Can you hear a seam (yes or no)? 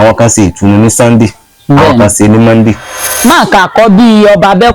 yes